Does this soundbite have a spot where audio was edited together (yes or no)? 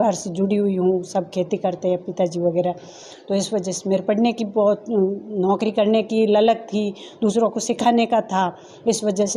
no